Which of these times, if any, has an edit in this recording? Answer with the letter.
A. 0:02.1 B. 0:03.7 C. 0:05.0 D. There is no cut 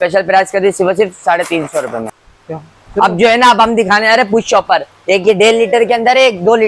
A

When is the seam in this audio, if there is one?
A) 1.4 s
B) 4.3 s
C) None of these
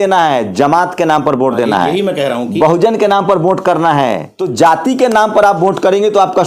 B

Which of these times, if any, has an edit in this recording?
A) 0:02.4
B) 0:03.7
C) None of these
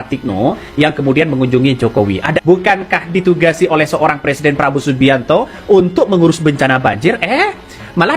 A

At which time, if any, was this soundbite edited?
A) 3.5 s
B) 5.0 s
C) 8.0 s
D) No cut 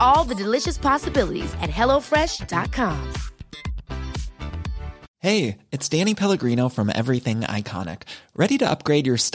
B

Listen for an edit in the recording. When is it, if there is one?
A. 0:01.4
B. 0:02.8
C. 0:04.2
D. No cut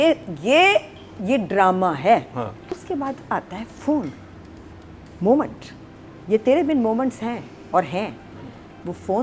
B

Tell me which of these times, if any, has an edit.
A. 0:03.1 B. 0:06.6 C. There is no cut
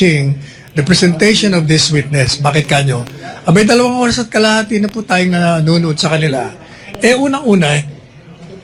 C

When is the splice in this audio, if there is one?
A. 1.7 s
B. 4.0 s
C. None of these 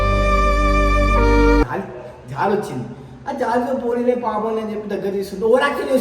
A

